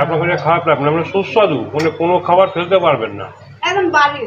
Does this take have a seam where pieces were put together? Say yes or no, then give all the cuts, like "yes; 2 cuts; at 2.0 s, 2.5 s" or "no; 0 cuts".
no; 0 cuts